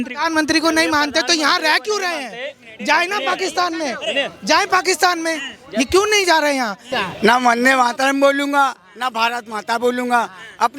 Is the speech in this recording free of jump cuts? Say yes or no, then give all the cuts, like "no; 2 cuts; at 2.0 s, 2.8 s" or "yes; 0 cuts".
no; 1 cut; at 6.9 s